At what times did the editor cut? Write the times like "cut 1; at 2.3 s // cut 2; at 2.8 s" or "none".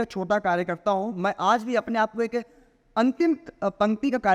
none